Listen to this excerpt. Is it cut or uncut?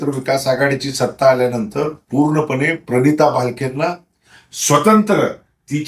uncut